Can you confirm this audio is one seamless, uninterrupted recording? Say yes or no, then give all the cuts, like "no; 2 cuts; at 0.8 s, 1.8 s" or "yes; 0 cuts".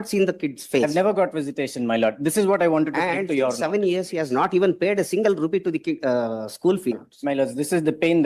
no; 1 cut; at 6.9 s